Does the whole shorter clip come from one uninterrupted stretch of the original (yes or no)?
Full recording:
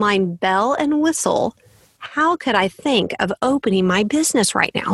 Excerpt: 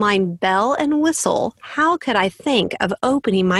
no